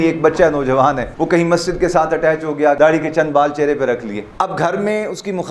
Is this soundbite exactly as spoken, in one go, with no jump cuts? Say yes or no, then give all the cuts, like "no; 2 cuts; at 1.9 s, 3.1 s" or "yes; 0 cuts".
no; 2 cuts; at 1.1 s, 2.8 s